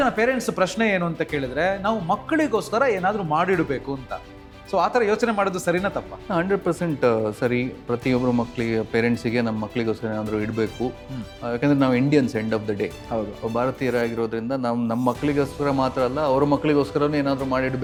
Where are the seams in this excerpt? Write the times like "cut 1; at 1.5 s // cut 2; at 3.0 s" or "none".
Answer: none